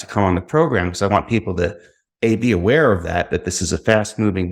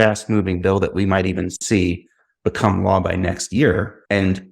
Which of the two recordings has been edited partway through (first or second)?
second